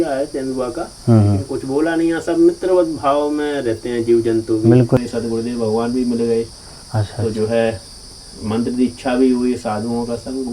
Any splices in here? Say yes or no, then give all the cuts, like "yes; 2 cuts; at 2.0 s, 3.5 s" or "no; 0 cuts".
yes; 1 cut; at 5.0 s